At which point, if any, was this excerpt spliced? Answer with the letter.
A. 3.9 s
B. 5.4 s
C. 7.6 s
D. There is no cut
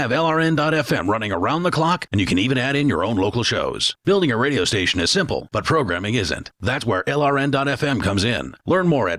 D